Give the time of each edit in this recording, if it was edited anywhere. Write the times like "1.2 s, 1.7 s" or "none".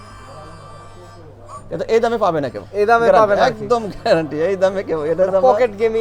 none